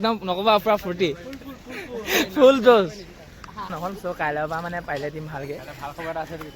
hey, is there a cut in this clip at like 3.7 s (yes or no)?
yes